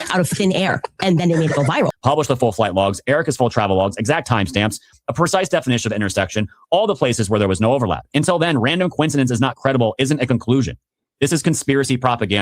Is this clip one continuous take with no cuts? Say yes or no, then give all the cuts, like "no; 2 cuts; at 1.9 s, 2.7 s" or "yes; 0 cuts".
no; 1 cut; at 1.9 s